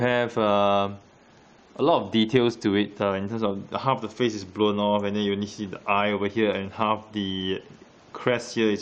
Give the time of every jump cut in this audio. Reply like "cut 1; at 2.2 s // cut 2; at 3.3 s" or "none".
cut 1; at 2.3 s